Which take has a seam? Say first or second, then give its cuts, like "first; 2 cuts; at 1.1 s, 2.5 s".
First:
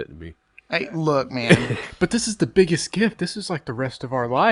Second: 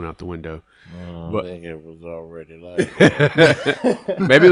first; 1 cut; at 1.9 s